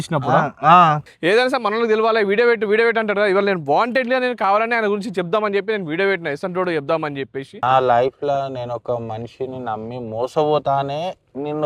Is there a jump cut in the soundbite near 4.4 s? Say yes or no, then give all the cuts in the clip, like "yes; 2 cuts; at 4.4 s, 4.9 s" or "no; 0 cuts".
no; 1 cut; at 7.5 s